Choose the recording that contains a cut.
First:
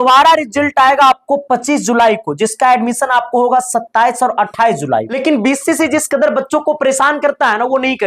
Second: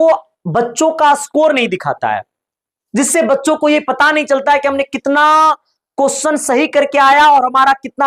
first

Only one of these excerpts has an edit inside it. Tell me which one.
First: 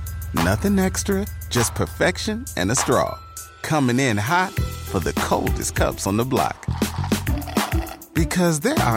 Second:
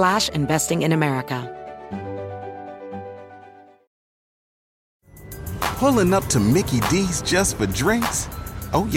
second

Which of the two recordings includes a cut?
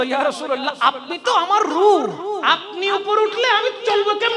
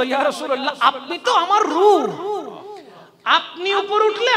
first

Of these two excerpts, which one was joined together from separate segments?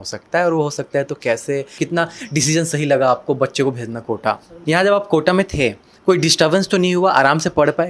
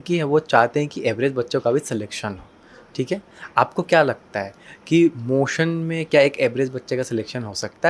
first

